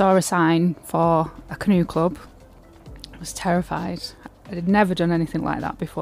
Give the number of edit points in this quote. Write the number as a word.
zero